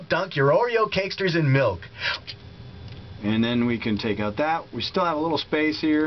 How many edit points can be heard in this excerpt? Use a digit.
0